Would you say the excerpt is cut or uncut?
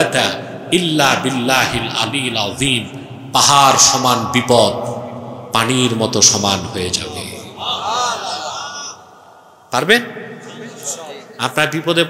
uncut